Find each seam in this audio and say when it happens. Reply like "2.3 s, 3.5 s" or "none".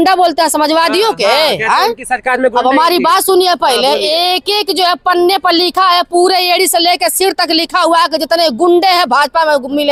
none